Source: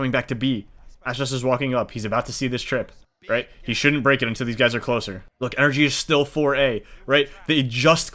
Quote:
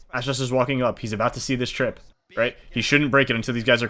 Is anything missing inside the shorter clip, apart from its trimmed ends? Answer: no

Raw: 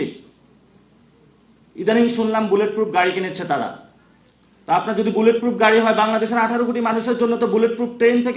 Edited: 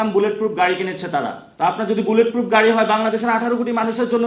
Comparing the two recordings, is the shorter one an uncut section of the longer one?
no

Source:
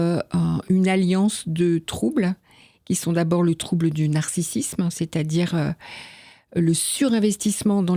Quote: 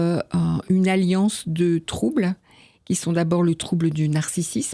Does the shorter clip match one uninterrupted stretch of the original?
yes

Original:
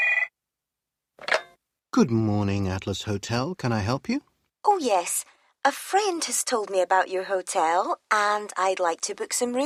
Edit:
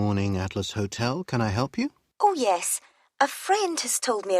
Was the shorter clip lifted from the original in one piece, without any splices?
no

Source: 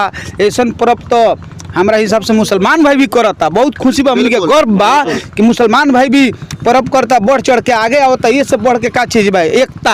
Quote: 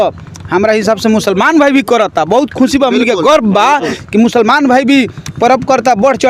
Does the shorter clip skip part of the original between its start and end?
no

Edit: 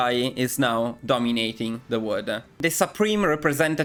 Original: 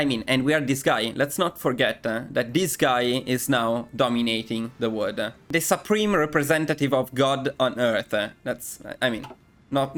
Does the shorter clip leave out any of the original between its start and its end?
no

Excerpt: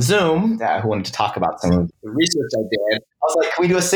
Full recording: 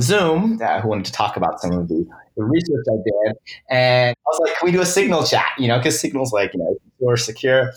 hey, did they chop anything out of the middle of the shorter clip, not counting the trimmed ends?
yes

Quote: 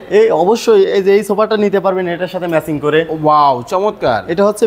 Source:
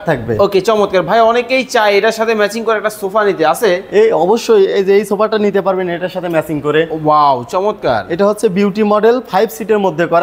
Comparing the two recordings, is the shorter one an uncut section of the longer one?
yes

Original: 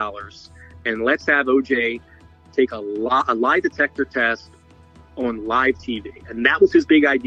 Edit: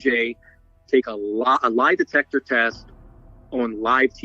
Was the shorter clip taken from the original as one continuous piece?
yes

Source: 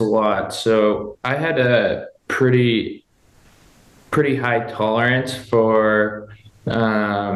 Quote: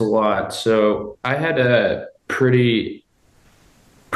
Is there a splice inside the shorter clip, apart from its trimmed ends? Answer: no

